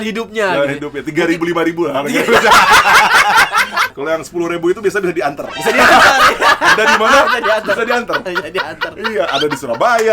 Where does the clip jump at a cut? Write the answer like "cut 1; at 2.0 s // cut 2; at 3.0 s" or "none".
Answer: cut 1; at 3.8 s